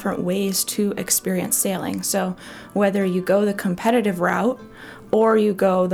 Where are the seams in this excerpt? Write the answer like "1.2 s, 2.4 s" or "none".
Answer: none